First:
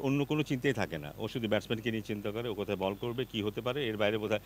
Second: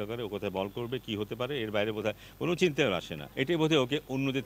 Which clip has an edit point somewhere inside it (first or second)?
second